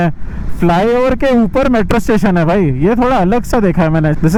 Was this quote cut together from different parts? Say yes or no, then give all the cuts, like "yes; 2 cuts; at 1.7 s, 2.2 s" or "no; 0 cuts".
no; 0 cuts